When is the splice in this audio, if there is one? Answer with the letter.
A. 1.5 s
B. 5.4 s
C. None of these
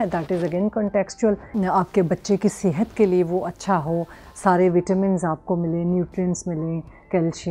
A